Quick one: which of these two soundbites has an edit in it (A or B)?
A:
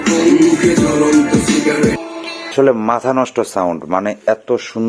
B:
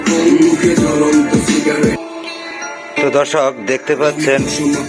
A